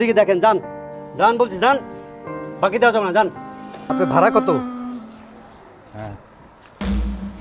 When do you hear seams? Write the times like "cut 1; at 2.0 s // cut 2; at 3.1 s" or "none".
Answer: cut 1; at 3.9 s